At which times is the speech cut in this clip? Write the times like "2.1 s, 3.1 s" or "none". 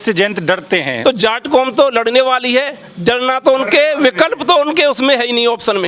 0.9 s